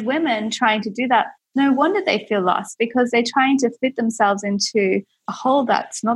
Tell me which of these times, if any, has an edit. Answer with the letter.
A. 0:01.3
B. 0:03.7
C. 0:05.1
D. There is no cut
D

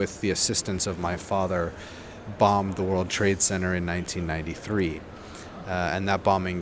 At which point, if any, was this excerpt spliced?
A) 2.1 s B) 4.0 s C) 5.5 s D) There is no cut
D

